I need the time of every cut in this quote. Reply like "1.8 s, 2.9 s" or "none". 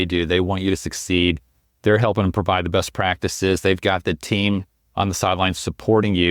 none